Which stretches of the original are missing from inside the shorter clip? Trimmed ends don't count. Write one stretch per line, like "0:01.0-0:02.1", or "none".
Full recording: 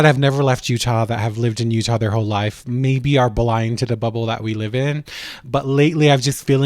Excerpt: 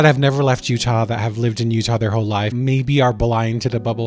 0:02.5-0:02.7